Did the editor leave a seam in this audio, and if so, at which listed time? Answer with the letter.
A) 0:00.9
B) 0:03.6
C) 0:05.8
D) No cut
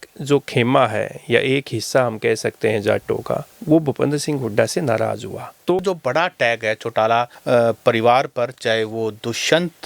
C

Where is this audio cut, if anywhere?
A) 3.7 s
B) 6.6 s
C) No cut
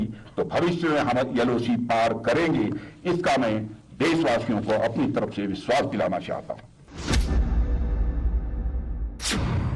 B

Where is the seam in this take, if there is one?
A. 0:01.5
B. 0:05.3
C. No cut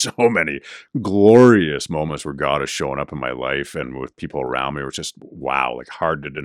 C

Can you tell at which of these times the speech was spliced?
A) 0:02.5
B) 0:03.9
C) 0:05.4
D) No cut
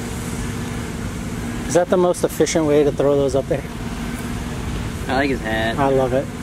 D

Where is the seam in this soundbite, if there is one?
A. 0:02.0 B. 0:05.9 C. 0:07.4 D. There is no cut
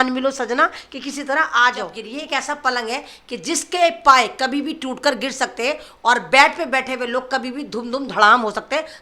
A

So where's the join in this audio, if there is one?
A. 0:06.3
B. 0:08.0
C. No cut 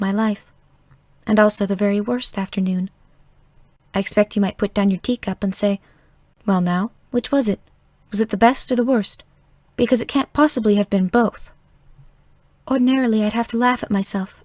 B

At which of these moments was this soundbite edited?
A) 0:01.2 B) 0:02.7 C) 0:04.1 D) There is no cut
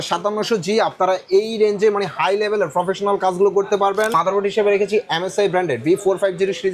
C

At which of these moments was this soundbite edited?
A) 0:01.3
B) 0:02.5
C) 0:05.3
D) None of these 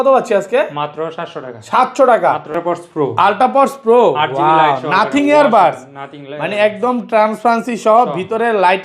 B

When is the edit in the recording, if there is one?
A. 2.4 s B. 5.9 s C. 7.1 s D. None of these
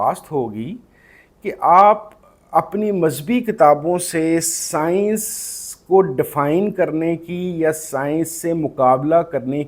D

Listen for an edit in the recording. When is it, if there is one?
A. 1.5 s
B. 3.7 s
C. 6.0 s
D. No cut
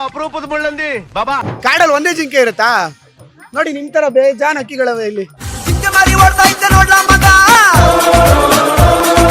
A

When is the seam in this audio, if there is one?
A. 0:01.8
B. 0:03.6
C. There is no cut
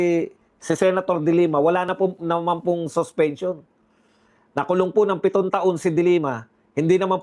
C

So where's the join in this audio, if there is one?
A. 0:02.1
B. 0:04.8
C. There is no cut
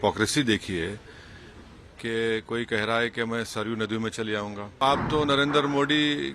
B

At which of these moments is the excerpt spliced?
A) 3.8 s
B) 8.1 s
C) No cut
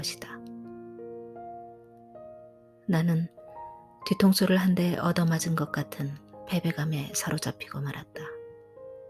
B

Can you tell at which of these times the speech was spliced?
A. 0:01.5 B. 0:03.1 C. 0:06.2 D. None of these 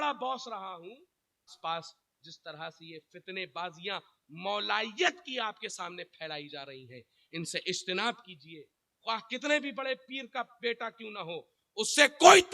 A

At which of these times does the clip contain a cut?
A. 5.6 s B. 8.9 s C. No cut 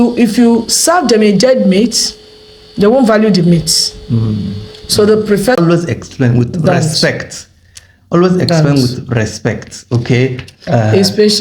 A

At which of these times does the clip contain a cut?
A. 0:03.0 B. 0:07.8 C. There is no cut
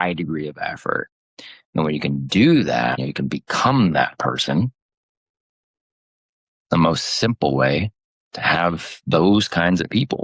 A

